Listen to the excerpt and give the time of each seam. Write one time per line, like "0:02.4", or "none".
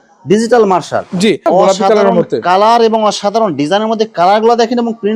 0:01.5